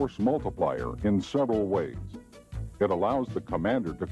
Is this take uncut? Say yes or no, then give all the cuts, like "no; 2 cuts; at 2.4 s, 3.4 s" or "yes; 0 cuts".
no; 1 cut; at 0.9 s